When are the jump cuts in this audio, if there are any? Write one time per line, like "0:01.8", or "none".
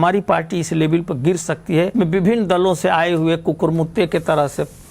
0:01.9